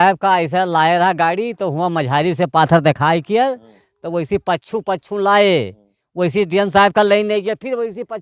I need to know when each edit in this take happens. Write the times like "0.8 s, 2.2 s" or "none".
none